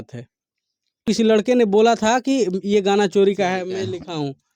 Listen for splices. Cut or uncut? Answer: cut